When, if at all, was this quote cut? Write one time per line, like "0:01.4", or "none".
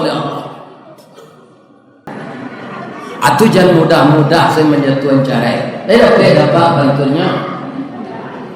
0:02.1